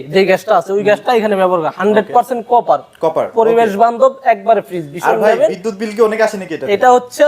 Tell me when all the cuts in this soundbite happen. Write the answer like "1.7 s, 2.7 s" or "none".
none

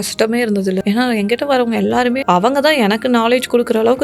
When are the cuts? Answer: 0.8 s, 2.2 s

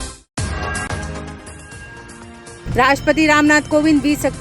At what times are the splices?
1.2 s

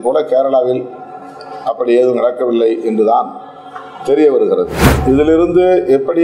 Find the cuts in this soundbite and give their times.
4.8 s

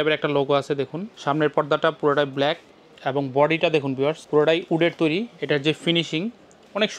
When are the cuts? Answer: 1.1 s, 4.2 s

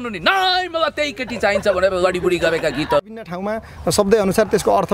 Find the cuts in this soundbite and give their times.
3.4 s

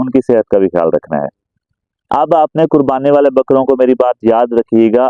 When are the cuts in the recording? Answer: 2.1 s

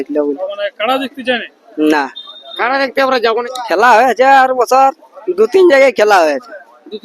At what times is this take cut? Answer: 3.4 s

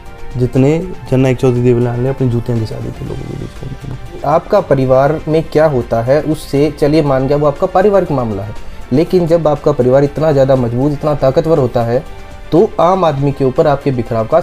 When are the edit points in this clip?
4.2 s

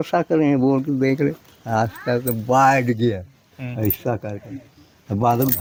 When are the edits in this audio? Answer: none

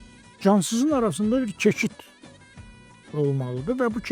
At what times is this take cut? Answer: none

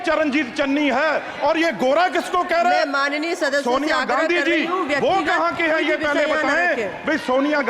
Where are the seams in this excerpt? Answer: none

